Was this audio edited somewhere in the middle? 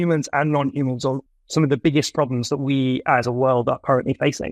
yes; 1 cut; at 1.2 s

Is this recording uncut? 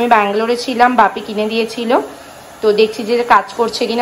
yes; 0 cuts

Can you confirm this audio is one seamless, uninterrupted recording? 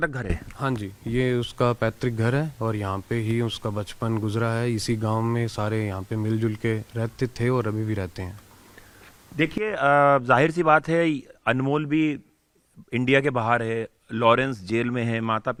yes; 0 cuts

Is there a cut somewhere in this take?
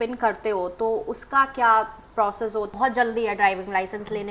yes; 1 cut; at 2.7 s

